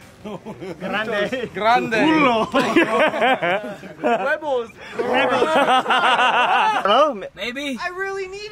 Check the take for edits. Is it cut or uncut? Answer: cut